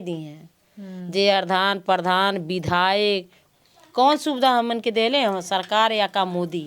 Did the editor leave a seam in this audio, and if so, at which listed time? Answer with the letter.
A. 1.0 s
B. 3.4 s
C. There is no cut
B